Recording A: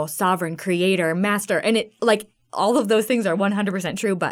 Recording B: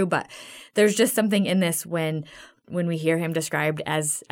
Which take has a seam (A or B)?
B